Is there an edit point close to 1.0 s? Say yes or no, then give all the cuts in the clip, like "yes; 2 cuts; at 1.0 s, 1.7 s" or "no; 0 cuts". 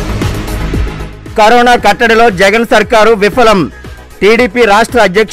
no; 0 cuts